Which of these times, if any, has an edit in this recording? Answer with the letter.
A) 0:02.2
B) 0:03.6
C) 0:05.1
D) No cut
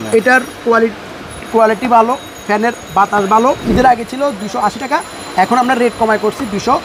B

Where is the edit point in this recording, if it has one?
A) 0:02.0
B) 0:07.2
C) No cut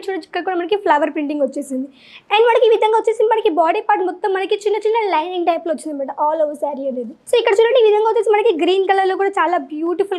B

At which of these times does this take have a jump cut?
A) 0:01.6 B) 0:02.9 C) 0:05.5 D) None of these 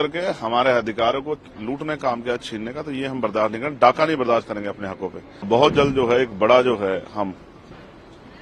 C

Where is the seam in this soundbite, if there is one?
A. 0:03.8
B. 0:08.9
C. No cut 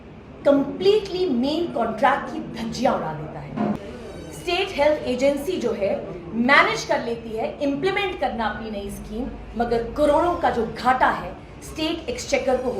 A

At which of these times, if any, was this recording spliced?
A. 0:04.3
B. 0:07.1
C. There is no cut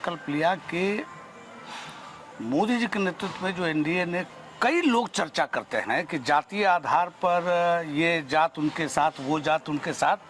A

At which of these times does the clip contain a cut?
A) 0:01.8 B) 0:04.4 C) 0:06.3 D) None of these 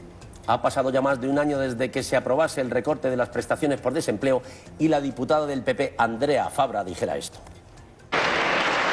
A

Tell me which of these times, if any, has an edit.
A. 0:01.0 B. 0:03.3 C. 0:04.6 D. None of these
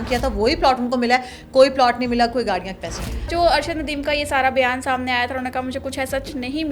B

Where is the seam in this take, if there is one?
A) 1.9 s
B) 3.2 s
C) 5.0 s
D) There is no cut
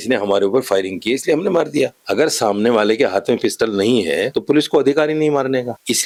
D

